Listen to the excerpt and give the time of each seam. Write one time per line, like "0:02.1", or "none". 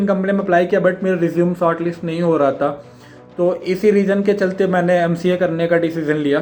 none